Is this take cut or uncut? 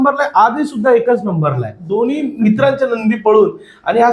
cut